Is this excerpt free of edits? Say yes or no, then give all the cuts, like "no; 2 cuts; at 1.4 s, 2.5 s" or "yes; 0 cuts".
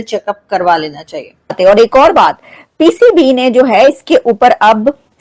no; 1 cut; at 1.6 s